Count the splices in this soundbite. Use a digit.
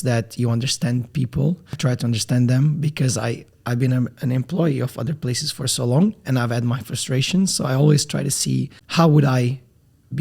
3